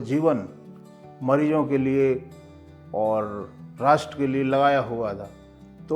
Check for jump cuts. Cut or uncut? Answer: uncut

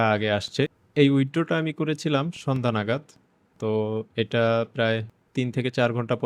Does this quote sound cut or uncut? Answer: cut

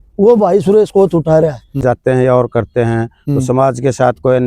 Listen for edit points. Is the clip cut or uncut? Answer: cut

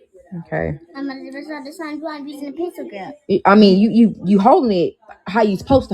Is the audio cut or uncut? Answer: cut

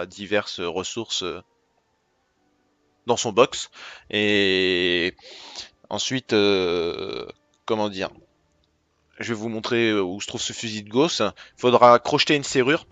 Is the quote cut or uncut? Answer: uncut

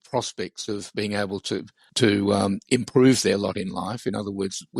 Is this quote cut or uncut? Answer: cut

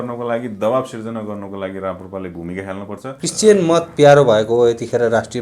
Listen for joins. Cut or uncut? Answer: cut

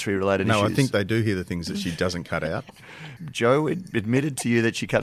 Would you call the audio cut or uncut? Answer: cut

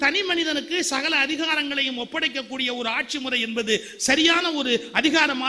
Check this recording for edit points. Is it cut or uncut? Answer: uncut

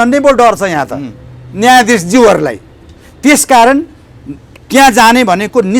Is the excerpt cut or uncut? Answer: uncut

